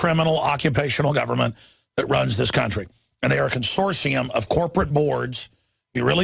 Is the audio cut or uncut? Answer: uncut